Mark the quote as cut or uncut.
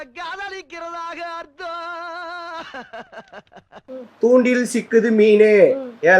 uncut